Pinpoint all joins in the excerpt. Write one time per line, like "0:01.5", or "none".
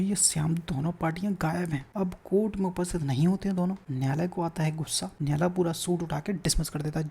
0:01.9
0:03.9
0:05.0